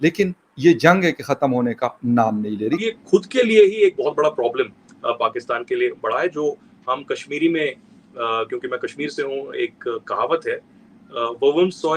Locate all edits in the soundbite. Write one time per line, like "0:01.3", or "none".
0:02.9